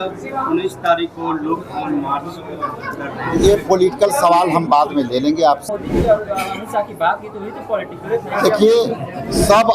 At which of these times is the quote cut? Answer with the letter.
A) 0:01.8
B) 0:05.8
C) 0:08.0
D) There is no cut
B